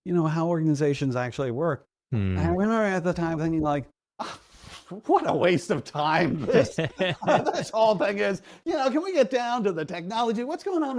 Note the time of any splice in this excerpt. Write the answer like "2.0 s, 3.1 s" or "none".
none